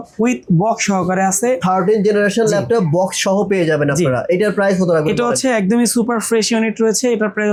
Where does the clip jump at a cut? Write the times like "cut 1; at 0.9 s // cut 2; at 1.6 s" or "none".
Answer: none